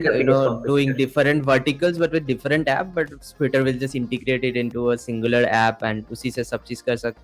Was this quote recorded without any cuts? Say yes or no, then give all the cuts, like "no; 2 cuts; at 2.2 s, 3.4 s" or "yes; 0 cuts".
yes; 0 cuts